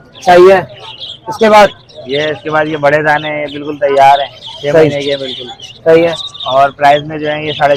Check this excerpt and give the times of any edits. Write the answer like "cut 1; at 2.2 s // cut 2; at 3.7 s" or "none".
none